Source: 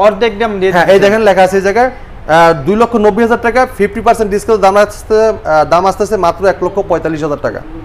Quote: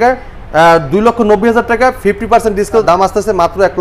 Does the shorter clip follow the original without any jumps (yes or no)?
no